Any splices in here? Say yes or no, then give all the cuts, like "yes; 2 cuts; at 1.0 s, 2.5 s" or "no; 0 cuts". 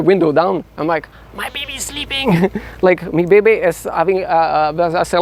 no; 0 cuts